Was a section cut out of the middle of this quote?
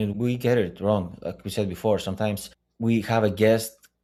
no; 0 cuts

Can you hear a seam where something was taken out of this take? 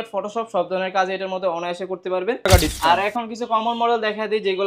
yes; 1 cut; at 2.5 s

